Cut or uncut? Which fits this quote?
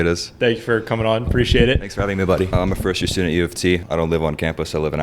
cut